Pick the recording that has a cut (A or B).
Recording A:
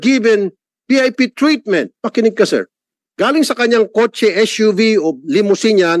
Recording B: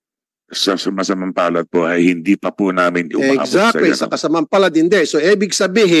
A